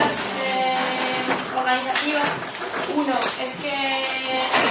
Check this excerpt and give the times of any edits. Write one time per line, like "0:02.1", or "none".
none